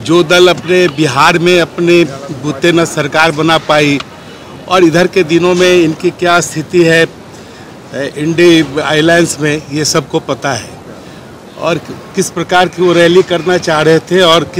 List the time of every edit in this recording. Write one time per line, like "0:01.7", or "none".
none